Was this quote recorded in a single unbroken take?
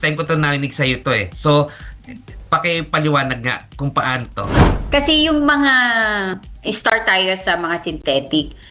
no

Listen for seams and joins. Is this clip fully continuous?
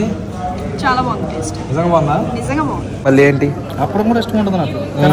yes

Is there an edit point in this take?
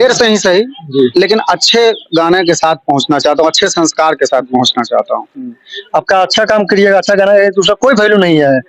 no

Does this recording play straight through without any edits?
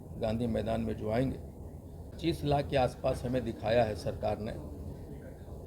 no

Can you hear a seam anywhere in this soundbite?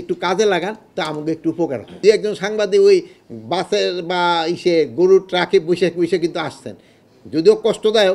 yes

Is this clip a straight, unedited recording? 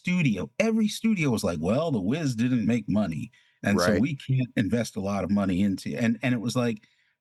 yes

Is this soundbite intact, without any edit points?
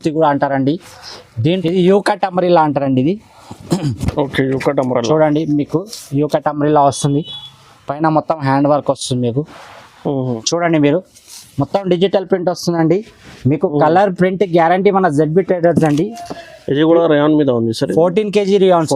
no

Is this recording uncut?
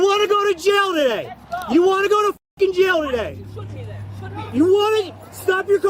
yes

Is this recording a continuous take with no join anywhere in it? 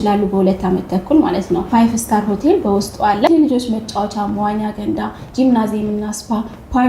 no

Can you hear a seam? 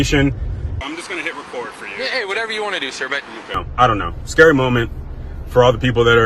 yes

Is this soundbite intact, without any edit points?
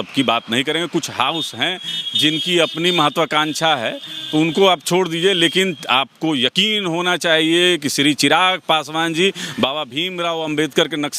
yes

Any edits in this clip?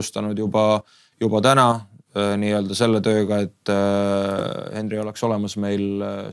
no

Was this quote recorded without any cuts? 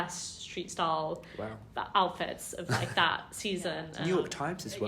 no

